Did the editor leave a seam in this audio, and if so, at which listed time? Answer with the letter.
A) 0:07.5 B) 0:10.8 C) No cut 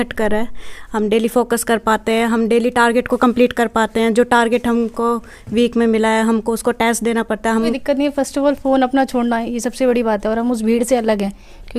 A